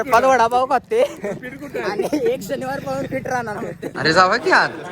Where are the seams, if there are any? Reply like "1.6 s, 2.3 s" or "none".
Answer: 3.9 s